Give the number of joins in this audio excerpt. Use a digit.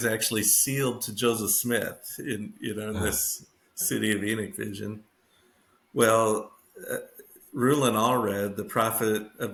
0